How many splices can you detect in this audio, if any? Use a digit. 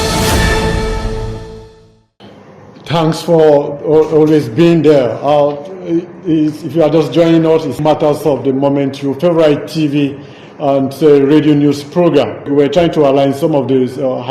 2